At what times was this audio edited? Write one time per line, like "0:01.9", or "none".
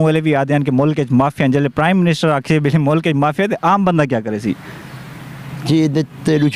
none